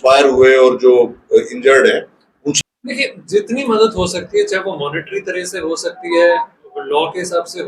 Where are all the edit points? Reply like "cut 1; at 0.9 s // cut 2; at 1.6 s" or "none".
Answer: cut 1; at 2.6 s